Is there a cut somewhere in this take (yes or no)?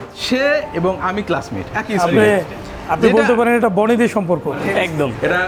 no